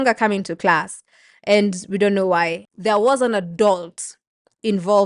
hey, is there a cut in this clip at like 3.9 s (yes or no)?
no